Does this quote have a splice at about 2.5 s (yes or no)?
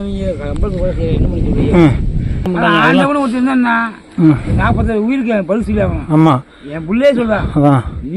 yes